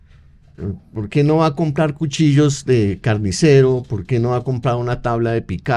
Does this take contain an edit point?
no; 0 cuts

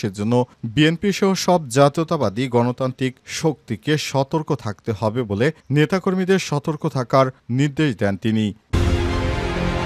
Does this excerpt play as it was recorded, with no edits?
no; 1 cut; at 8.8 s

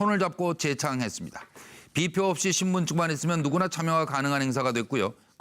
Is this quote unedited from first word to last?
no; 1 cut; at 4.2 s

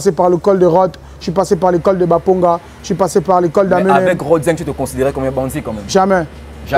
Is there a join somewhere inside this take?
no; 0 cuts

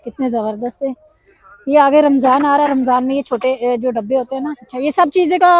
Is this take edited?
yes; 1 cut; at 4.6 s

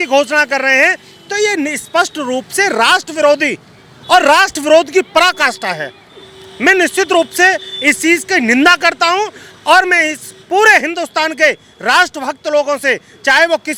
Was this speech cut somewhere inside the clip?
no; 0 cuts

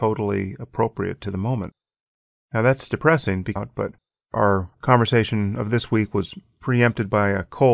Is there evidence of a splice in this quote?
no; 0 cuts

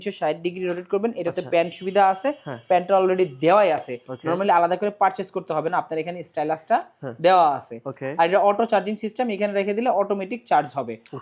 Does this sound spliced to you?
no; 0 cuts

